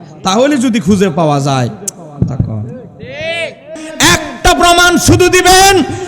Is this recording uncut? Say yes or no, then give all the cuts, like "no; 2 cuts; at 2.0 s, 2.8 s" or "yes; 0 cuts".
no; 1 cut; at 3.8 s